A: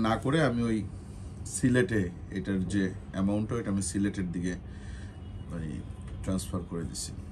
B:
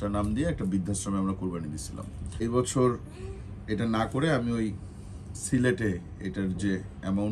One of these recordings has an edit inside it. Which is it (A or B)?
B